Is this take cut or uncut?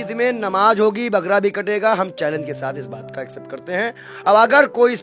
uncut